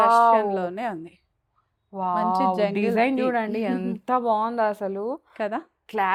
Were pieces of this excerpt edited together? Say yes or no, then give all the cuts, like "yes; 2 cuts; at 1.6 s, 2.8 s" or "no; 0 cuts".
no; 0 cuts